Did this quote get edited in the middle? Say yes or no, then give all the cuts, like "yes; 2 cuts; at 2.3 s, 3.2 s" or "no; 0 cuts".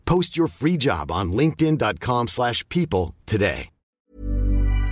yes; 1 cut; at 3.8 s